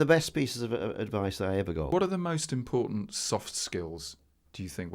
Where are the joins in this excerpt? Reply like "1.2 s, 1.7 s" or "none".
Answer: 1.9 s